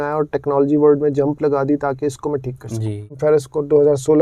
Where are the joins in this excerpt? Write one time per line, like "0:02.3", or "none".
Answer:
0:03.1